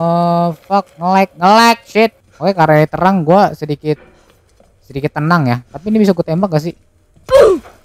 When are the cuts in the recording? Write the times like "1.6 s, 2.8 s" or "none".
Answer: 2.3 s